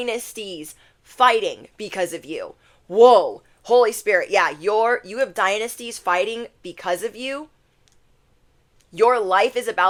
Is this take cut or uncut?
uncut